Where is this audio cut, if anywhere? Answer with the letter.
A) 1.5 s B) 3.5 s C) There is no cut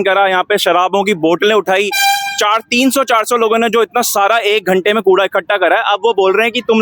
C